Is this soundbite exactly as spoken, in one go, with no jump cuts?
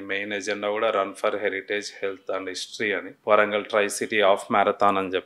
no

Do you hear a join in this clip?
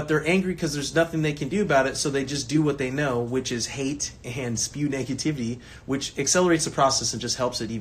no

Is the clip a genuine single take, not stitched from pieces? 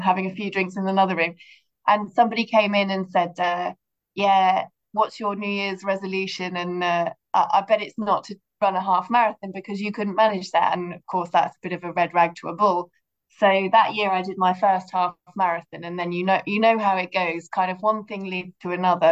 yes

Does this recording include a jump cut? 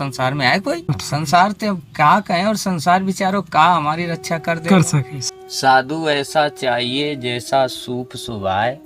yes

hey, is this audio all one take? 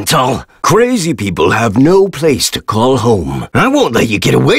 yes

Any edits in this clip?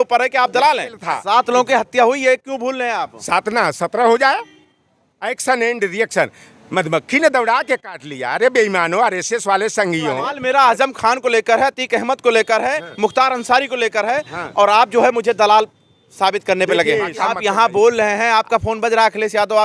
yes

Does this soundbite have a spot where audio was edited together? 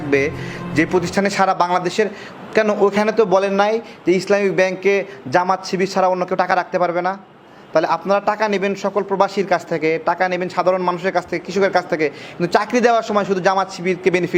no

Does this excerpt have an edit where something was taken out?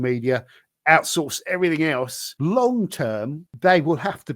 yes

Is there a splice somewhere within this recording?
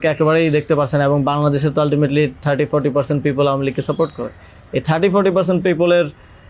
no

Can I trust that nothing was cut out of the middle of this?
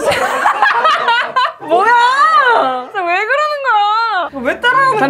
yes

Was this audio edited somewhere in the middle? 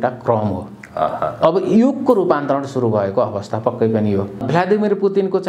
yes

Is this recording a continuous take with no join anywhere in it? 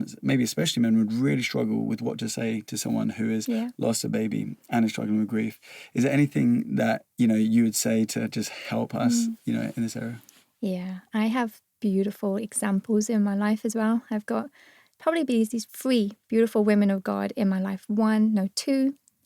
yes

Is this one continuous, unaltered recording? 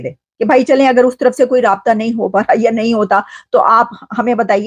yes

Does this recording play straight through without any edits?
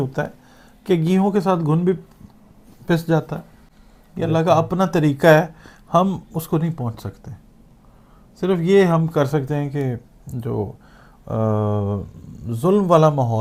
yes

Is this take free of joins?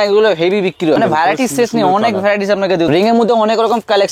no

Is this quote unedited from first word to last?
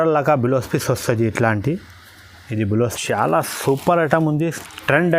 no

